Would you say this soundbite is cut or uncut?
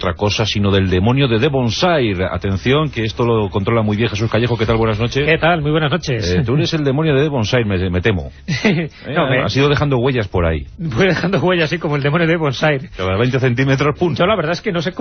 cut